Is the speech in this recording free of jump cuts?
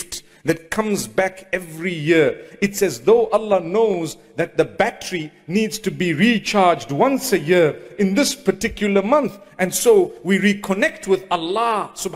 yes; 0 cuts

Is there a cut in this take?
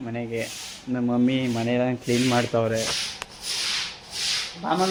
no; 0 cuts

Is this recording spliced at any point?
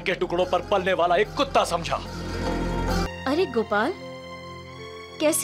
yes; 1 cut; at 3.1 s

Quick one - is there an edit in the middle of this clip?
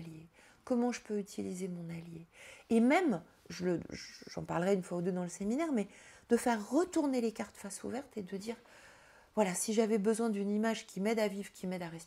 no; 0 cuts

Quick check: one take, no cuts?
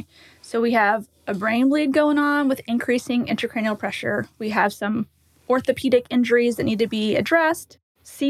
yes; 0 cuts

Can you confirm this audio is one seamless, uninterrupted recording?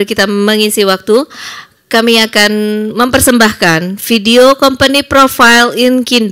yes; 0 cuts

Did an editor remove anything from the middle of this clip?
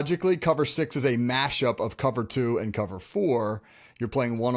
no; 0 cuts

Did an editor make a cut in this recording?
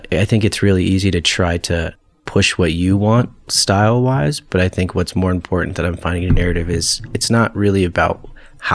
no; 0 cuts

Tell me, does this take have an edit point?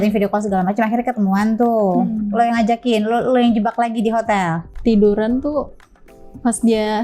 yes; 1 cut; at 4.6 s

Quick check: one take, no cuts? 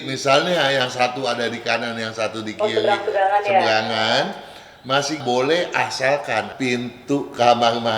no; 1 cut; at 6.5 s

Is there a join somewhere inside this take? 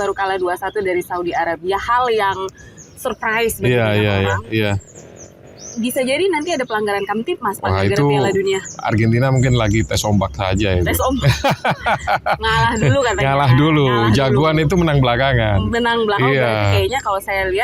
no; 0 cuts

